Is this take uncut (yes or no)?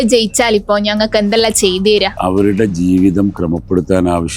no